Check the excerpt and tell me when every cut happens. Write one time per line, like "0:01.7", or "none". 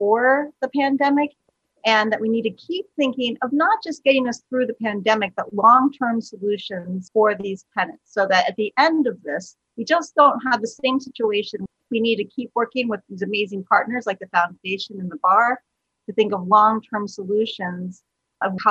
0:11.8